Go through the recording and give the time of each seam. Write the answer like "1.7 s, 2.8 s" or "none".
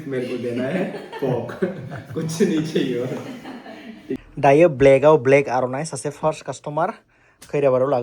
4.2 s